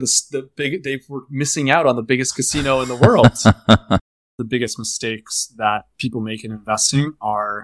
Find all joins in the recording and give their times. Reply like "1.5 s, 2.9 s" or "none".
4.2 s